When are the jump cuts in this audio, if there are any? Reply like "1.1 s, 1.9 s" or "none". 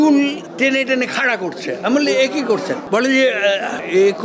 none